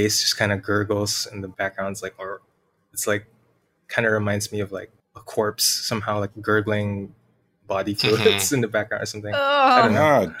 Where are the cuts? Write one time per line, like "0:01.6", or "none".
0:01.5